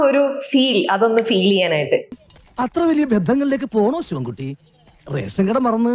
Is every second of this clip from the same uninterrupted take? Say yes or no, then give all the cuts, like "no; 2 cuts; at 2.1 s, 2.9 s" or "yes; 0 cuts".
yes; 0 cuts